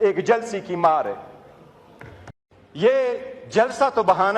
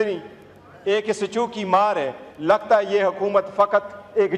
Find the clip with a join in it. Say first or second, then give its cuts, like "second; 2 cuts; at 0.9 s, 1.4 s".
first; 1 cut; at 2.2 s